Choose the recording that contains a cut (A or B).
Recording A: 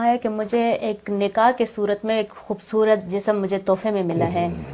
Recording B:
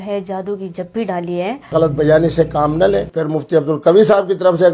B